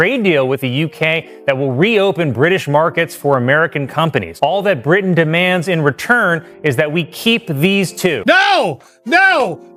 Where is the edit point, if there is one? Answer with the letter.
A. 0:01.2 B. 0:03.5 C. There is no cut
C